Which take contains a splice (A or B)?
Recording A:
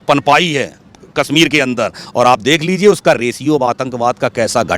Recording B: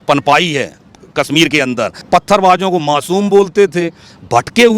B